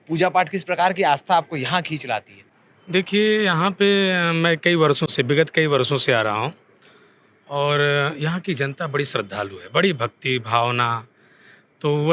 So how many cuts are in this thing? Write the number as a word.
zero